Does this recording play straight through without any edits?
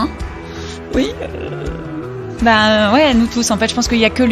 yes; 0 cuts

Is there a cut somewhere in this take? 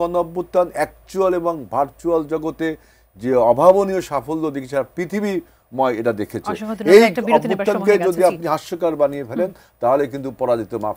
no; 0 cuts

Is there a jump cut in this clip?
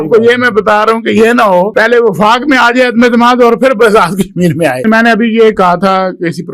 yes; 2 cuts; at 1.7 s, 4.8 s

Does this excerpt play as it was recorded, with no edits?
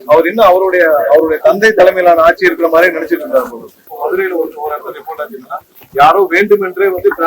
no; 1 cut; at 3.8 s

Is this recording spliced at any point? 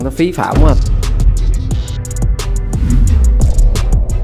no; 0 cuts

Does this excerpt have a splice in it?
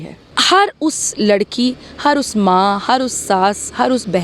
no; 0 cuts

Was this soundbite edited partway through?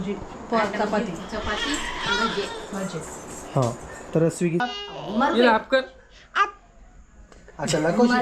yes; 1 cut; at 4.7 s

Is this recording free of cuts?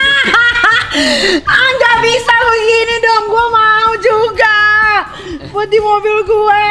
yes; 0 cuts

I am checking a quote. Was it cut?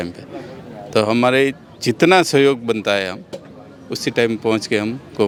no; 0 cuts

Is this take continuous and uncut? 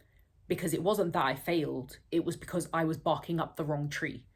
yes; 0 cuts

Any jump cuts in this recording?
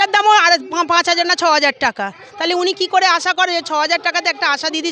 no; 0 cuts

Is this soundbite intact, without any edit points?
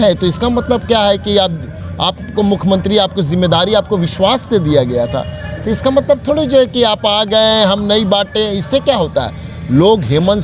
yes; 0 cuts

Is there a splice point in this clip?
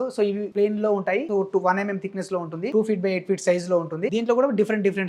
yes; 3 cuts; at 1.3 s, 2.7 s, 4.1 s

